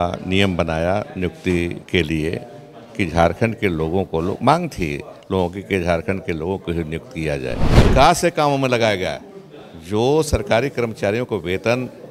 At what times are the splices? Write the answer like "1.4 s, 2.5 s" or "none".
7.8 s